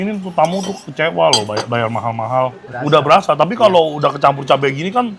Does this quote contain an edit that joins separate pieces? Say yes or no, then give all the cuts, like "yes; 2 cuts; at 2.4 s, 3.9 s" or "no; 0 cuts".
no; 0 cuts